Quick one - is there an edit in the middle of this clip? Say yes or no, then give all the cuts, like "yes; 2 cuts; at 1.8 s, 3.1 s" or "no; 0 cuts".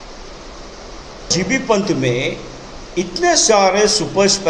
yes; 1 cut; at 1.3 s